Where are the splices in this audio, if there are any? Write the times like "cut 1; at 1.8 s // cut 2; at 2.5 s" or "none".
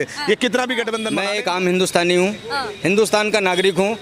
cut 1; at 1.1 s

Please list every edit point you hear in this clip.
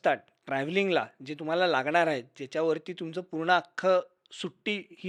none

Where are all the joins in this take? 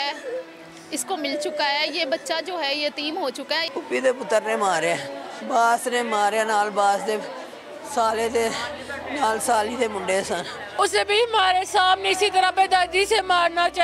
cut 1; at 3.7 s // cut 2; at 10.7 s

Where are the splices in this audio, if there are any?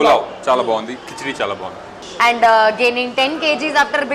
cut 1; at 1.9 s

